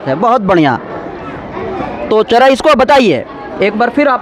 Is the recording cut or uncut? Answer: uncut